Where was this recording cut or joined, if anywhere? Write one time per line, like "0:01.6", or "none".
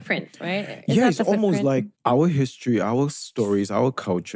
none